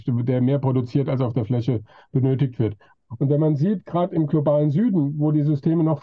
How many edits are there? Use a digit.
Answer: 1